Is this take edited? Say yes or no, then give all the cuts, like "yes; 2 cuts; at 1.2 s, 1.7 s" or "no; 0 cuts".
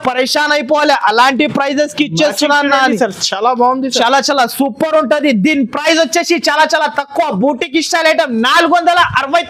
no; 0 cuts